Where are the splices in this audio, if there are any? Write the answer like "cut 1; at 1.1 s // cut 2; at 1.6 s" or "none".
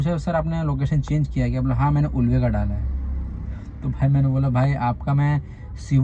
none